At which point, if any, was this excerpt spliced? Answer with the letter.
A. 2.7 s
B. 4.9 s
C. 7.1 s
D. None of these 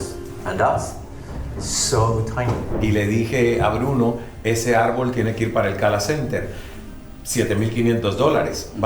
A